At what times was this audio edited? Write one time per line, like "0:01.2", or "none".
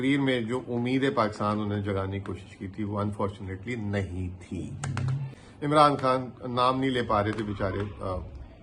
0:05.4